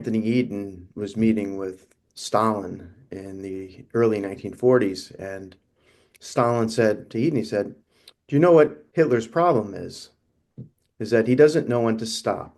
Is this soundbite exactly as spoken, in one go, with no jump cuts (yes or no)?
no